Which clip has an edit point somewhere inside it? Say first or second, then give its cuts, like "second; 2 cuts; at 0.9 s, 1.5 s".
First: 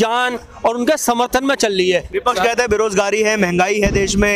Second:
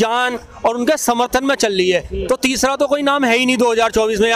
first; 1 cut; at 2.1 s